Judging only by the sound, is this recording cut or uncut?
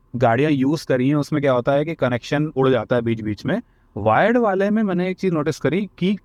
uncut